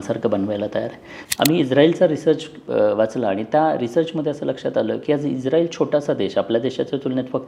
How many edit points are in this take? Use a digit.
1